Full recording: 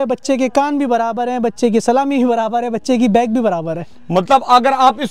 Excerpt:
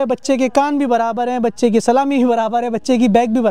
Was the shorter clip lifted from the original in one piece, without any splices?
yes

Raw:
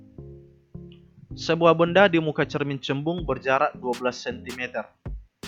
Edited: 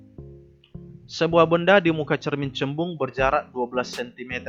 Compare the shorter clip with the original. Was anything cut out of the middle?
yes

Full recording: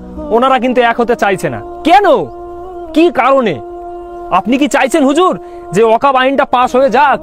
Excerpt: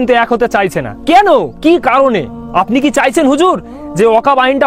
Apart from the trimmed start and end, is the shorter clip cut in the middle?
yes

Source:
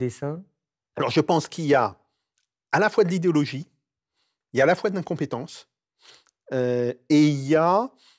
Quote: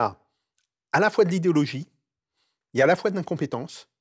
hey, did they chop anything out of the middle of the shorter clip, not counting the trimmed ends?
no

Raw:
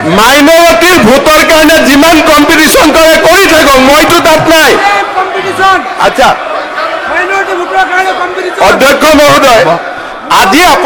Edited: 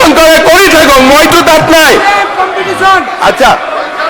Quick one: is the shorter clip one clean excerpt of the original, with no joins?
yes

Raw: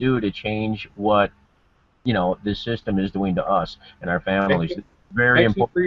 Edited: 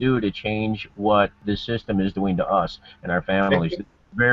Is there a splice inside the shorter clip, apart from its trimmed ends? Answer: yes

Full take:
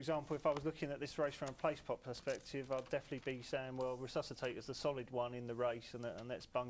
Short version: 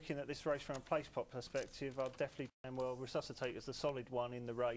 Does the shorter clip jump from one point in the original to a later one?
yes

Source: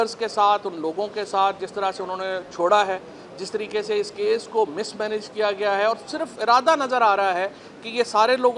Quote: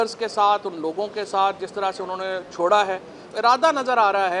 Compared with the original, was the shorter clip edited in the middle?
yes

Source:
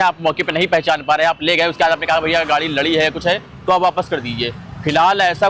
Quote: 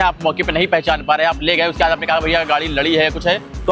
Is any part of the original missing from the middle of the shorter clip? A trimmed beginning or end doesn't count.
no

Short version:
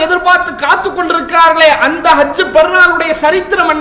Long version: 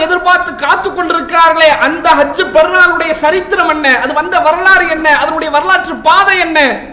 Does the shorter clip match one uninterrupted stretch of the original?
yes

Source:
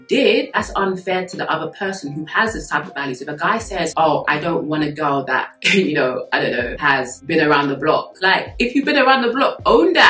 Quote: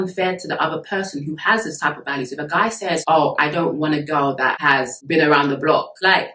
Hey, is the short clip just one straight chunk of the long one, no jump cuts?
no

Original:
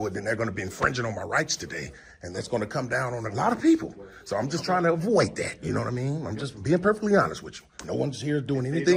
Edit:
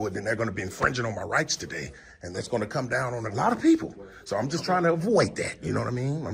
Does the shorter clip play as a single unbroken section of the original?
yes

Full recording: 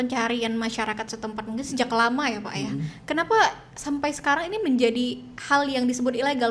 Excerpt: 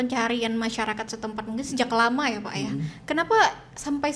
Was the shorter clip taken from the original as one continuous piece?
yes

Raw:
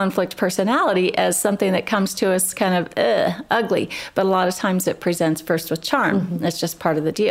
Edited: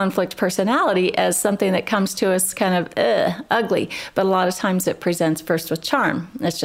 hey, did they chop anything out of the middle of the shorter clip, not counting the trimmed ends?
no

